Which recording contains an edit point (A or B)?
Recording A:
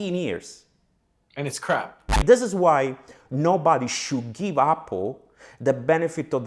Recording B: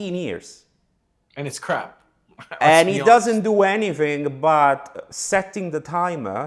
A